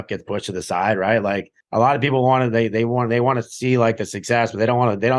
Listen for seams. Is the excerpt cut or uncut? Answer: cut